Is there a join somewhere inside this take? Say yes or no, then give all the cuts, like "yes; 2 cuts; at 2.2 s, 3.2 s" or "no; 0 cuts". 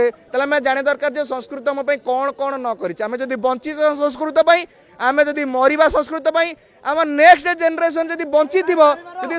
no; 0 cuts